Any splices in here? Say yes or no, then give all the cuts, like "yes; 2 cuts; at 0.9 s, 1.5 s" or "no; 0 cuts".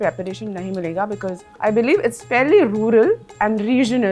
no; 0 cuts